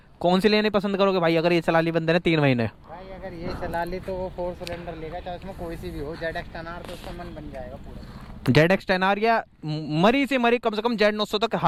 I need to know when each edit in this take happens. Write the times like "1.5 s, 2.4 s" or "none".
none

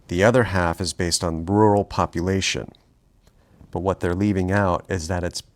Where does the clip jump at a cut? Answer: 2.8 s

